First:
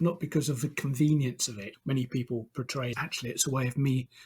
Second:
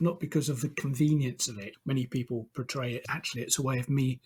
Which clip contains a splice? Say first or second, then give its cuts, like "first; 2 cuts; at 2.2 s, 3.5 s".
first; 1 cut; at 2.9 s